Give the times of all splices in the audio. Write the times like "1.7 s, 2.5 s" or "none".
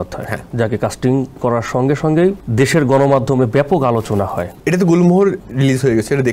2.4 s, 4.5 s, 5.4 s